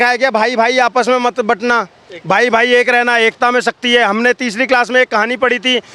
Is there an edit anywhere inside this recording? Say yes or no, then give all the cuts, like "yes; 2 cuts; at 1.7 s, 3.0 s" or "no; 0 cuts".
no; 0 cuts